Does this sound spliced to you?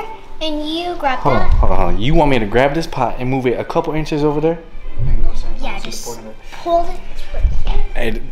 no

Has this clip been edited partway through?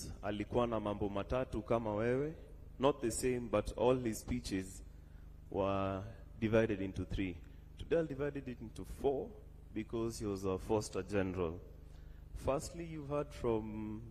no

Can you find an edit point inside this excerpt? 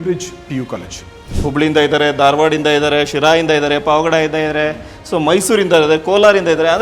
yes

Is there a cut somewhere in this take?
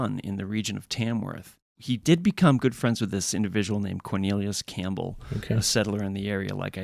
yes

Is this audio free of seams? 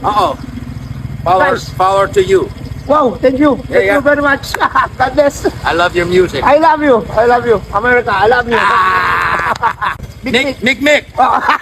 no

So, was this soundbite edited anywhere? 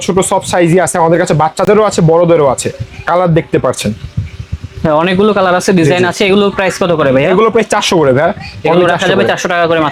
no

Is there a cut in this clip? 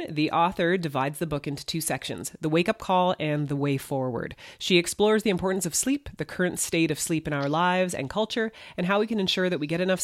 no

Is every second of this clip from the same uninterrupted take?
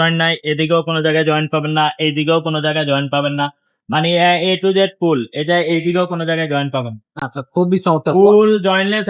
yes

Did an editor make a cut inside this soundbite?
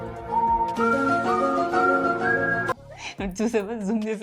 no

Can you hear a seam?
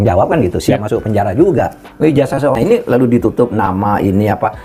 yes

